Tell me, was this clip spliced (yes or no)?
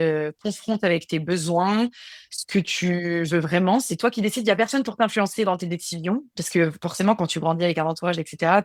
no